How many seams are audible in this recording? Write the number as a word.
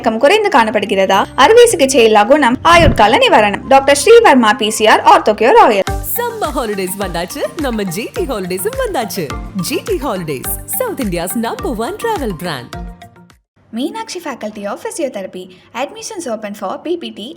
zero